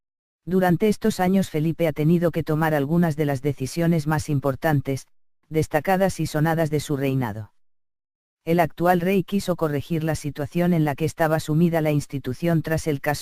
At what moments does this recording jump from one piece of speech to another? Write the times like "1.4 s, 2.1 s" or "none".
11.7 s